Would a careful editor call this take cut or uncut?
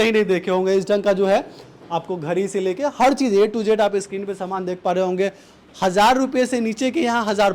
uncut